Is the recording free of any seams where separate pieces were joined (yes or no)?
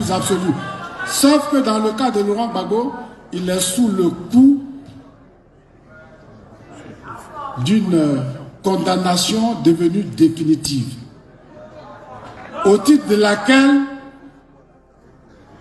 yes